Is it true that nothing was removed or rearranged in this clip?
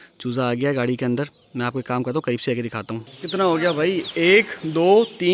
no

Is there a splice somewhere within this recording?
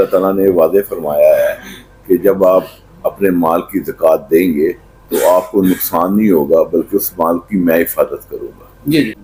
no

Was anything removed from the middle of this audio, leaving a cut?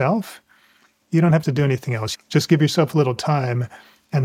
yes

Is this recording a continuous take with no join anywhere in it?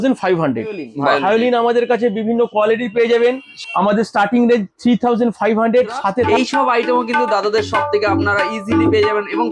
no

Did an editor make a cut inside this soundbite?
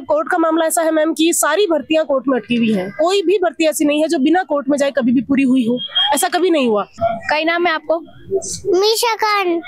yes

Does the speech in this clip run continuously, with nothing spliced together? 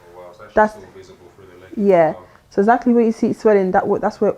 yes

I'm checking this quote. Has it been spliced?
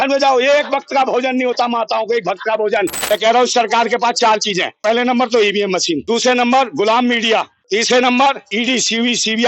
yes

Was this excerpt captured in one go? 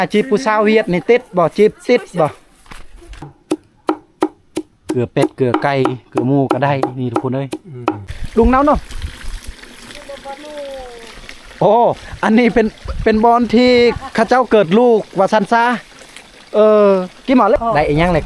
no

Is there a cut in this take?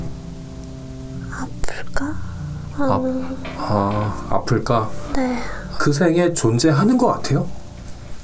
yes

